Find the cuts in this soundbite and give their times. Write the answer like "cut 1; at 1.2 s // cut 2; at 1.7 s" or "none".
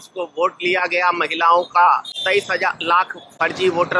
cut 1; at 2.1 s